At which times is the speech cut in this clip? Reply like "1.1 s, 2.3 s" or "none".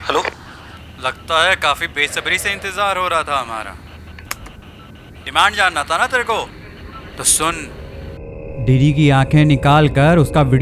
8.1 s